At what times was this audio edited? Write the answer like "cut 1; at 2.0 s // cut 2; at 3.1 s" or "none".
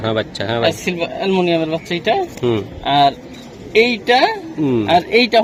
none